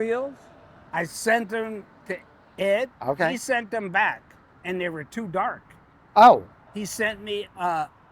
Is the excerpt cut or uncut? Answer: cut